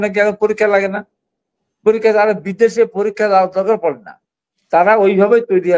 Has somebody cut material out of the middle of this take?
no; 0 cuts

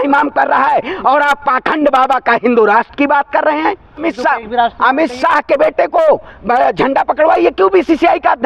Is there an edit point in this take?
yes; 1 cut; at 4.1 s

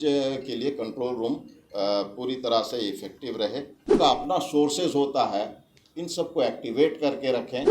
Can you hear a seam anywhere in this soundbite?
yes; 1 cut; at 4.0 s

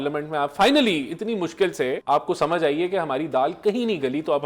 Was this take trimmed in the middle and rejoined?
yes; 1 cut; at 2.0 s

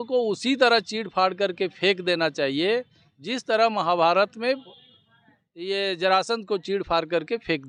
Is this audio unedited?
yes; 0 cuts

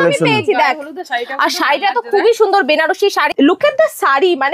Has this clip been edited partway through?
yes; 1 cut; at 3.3 s

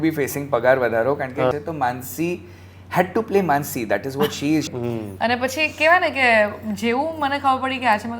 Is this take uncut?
no; 2 cuts; at 1.5 s, 4.7 s

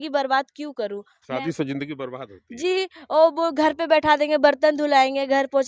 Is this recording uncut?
yes; 0 cuts

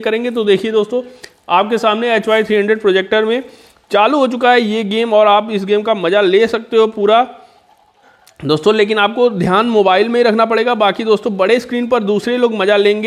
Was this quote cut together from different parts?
no; 0 cuts

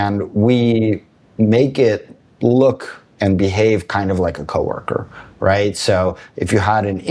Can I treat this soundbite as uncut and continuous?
yes; 0 cuts

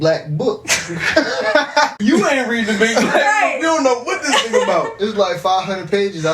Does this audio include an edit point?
yes; 1 cut; at 2.0 s

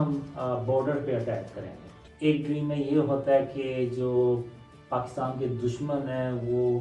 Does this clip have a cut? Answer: yes; 1 cut; at 2.0 s

